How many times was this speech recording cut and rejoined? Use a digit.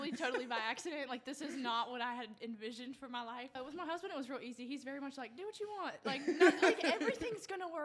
1